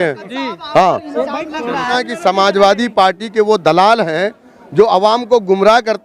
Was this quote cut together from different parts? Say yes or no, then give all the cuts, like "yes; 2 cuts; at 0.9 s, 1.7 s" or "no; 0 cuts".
yes; 1 cut; at 1.9 s